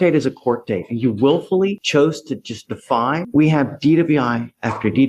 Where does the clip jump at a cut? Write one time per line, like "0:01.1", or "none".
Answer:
0:03.2